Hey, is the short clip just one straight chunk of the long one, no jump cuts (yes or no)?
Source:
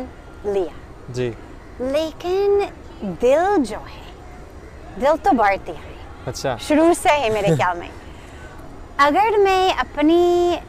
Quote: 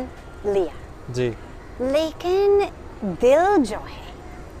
yes